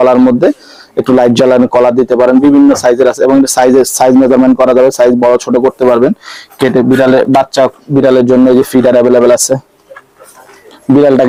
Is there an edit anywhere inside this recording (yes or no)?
no